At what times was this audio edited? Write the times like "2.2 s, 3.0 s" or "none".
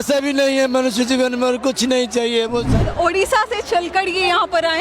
2.7 s

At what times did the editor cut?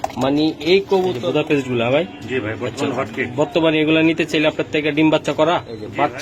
1.2 s, 5.3 s

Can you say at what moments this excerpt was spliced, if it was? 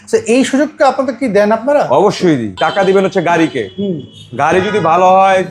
2.5 s

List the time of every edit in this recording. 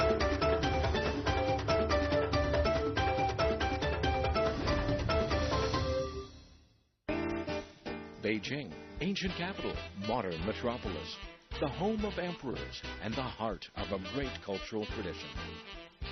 10.6 s

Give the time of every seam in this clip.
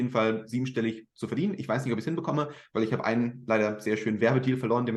none

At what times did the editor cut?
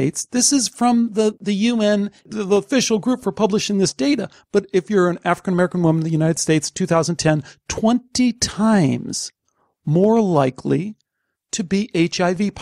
1.4 s

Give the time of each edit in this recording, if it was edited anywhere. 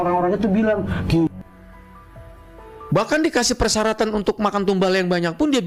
none

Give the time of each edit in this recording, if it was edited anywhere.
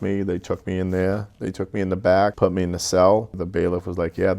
2.3 s, 3.4 s

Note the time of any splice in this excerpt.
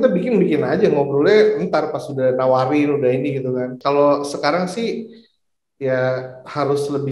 3.7 s

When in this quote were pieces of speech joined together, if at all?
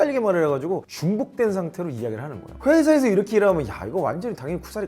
2.5 s

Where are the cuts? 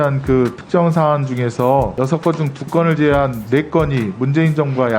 1.9 s

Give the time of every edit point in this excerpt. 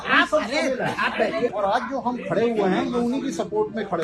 1.5 s

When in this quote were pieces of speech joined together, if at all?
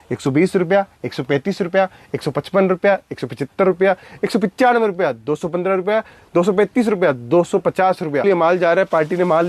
8.2 s

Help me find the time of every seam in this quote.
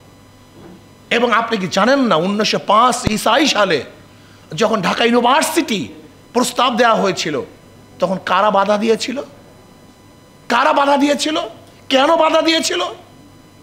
none

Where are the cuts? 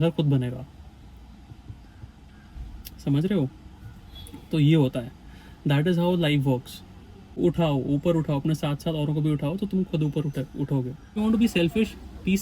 7.4 s, 11.2 s

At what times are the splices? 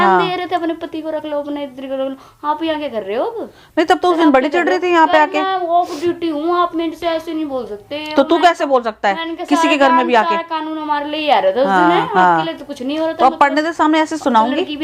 none

